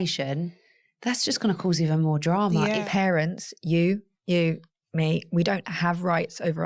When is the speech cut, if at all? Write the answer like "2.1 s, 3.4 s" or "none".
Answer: 2.8 s

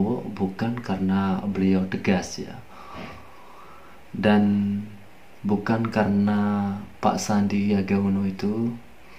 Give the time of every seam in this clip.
none

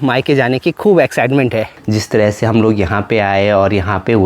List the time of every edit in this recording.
1.8 s

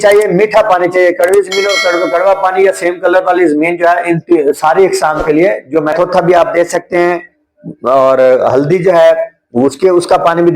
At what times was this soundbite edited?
5.9 s

